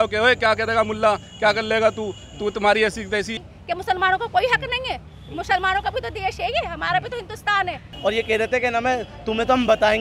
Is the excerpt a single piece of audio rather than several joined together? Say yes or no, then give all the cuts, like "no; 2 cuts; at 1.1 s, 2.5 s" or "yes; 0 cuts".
no; 2 cuts; at 3.4 s, 7.9 s